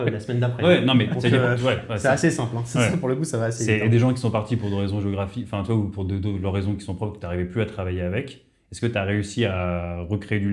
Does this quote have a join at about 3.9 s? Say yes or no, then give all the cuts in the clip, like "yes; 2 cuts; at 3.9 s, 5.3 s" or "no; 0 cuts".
no; 0 cuts